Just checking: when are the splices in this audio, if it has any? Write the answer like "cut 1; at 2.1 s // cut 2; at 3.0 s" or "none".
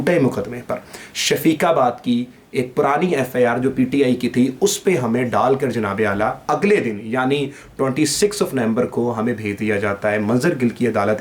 none